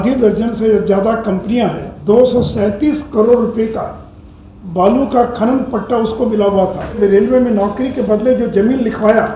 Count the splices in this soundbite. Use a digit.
2